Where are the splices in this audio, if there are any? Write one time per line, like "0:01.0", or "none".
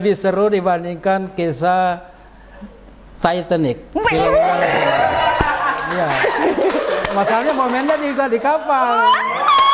none